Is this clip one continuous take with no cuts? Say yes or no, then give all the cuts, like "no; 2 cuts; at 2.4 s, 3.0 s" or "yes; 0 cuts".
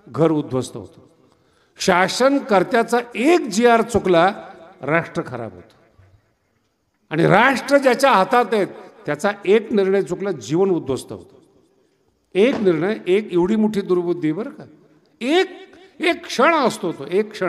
yes; 0 cuts